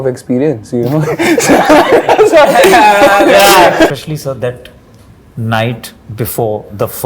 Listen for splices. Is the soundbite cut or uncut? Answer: cut